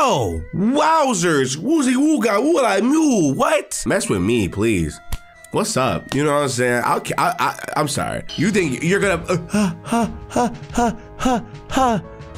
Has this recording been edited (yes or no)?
yes